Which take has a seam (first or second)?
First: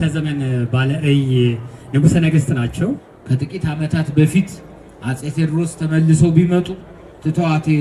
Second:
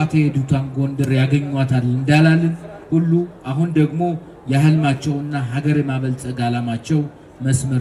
first